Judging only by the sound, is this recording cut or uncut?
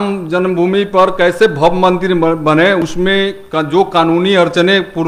uncut